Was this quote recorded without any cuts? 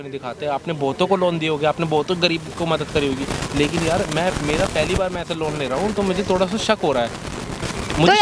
yes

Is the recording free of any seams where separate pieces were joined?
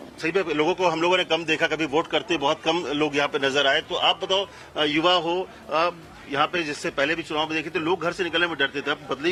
yes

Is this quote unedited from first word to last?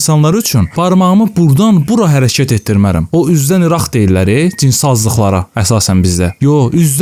yes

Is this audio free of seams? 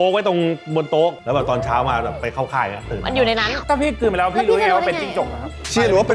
no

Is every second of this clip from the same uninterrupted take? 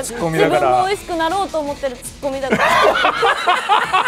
yes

